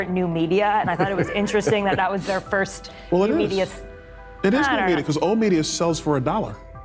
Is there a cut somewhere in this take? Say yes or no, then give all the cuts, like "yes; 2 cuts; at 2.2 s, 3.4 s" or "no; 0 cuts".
no; 0 cuts